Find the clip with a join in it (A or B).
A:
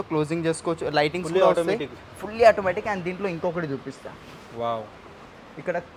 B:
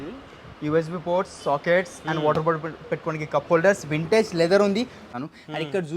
B